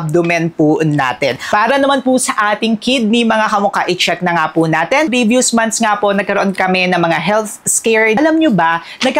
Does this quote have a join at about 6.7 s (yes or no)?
no